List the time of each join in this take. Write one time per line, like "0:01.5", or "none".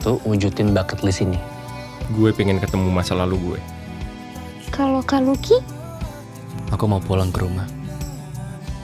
none

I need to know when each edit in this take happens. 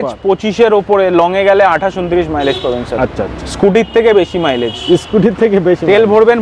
none

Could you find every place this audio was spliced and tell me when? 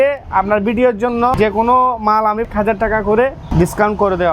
0:01.3
0:02.5
0:03.4

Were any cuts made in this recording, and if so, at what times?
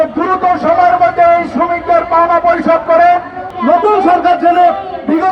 0:03.5

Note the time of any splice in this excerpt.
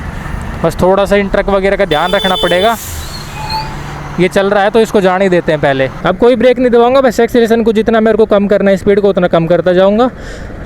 0:05.9

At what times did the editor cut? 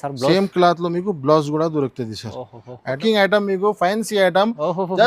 0:03.0

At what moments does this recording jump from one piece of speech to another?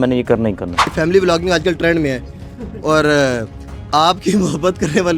0:00.9

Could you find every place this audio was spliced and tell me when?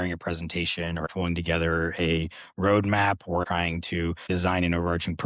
0:01.1
0:03.6

